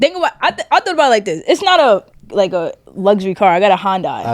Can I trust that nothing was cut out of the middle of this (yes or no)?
no